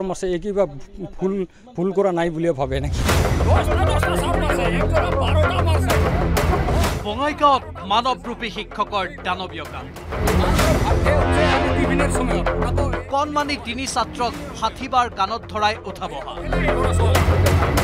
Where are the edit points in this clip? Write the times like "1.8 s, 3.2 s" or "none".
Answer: 2.6 s